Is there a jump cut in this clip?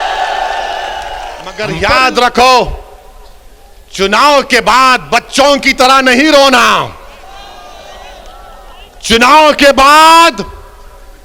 yes; 1 cut; at 1.7 s

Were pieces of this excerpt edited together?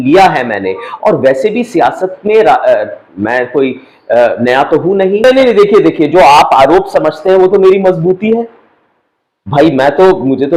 yes; 1 cut; at 5.2 s

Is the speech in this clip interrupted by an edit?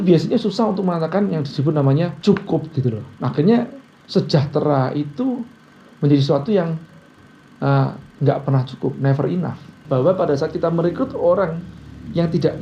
yes; 2 cuts; at 2.2 s, 9.8 s

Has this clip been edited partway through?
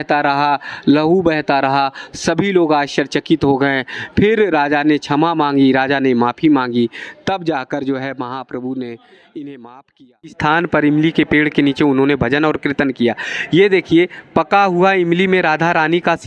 yes; 1 cut; at 10.4 s

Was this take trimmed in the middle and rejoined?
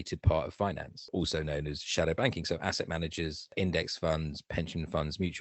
yes; 2 cuts; at 1.1 s, 3.5 s

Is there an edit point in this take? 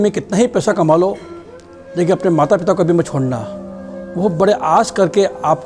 no; 0 cuts

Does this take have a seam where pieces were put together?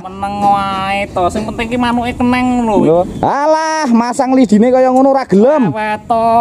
yes; 1 cut; at 3.1 s

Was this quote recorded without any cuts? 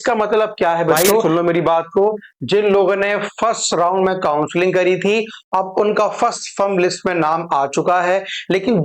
no; 1 cut; at 1.1 s

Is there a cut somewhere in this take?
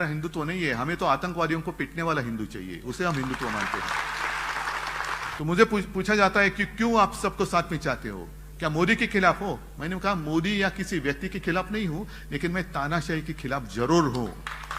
yes; 1 cut; at 5.3 s

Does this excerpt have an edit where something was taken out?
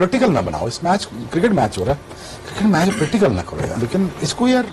yes; 1 cut; at 3.7 s

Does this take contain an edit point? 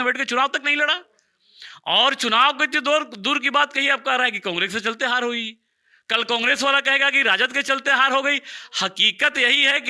no; 0 cuts

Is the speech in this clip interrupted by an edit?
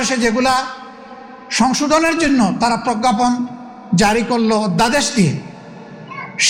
no; 0 cuts

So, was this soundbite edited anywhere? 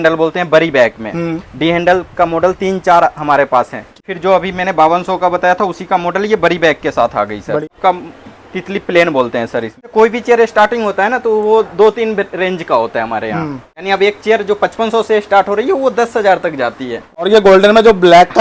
yes; 5 cuts; at 4.1 s, 7.7 s, 9.9 s, 13.8 s, 17.3 s

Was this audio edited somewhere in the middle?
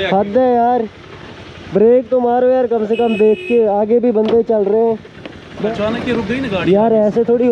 yes; 1 cut; at 5.6 s

